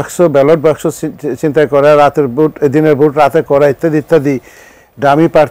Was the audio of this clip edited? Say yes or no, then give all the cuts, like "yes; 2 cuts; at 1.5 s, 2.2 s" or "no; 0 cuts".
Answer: no; 0 cuts